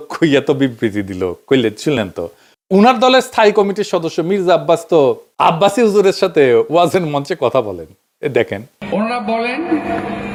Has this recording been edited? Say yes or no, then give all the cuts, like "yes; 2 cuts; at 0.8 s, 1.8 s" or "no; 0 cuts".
no; 0 cuts